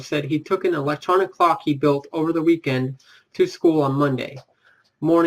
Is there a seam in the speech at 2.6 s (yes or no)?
yes